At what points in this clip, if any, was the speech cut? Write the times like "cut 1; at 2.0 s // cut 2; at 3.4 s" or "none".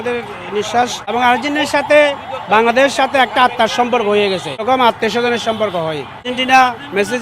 cut 1; at 1.1 s // cut 2; at 4.6 s // cut 3; at 6.3 s

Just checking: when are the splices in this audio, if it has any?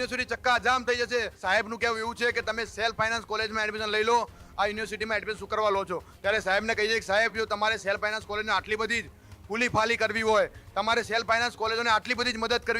cut 1; at 1.4 s

